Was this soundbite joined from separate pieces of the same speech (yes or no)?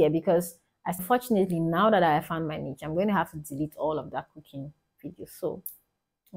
yes